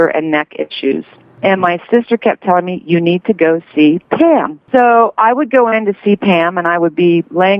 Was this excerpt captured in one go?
no; 2 cuts; at 1.3 s, 4.6 s

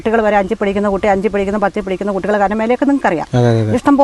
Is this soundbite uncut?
yes; 0 cuts

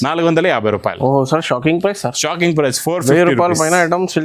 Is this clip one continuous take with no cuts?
yes; 0 cuts

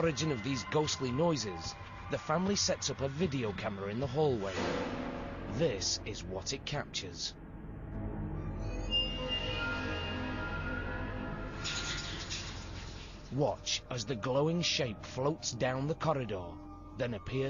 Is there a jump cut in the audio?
yes; 1 cut; at 3.3 s

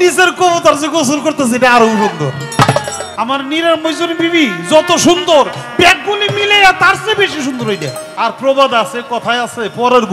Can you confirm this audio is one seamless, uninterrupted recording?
no; 2 cuts; at 3.0 s, 8.0 s

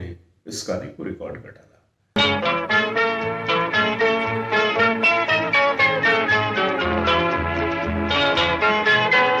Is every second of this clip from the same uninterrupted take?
yes; 0 cuts

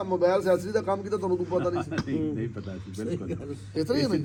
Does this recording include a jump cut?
no; 0 cuts

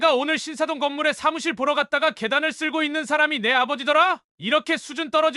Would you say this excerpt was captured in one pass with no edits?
no; 1 cut; at 4.3 s

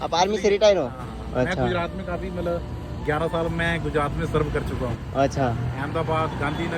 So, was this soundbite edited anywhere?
no; 0 cuts

